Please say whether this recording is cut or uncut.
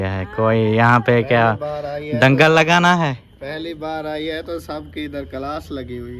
uncut